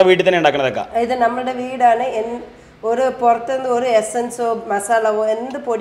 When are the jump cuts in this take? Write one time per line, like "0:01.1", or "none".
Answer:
none